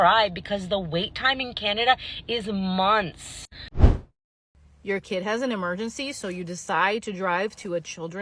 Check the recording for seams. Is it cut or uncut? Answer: cut